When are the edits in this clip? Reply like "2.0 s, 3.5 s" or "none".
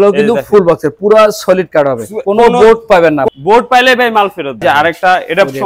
3.3 s, 4.6 s